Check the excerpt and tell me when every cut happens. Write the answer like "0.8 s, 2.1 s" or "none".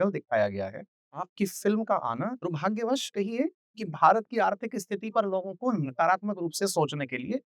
1.2 s, 2.5 s